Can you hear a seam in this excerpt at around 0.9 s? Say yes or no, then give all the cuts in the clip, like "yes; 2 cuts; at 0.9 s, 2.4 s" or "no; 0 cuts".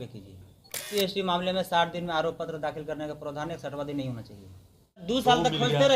yes; 2 cuts; at 0.9 s, 5.0 s